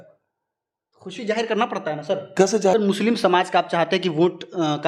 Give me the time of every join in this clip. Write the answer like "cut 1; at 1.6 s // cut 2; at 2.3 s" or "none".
cut 1; at 2.7 s